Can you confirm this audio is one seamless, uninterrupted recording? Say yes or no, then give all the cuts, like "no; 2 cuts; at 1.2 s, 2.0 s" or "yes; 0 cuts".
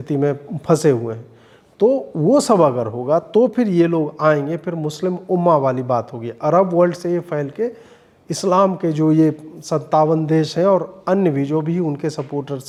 yes; 0 cuts